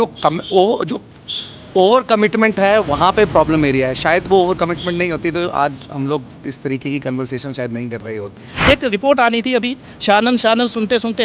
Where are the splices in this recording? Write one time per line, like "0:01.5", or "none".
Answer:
0:08.6